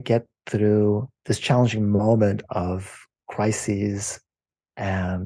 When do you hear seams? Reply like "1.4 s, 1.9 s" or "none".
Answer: 1.1 s